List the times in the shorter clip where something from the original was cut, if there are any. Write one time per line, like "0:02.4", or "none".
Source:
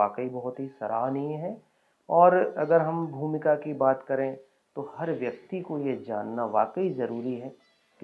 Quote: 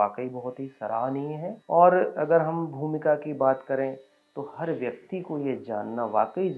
0:01.6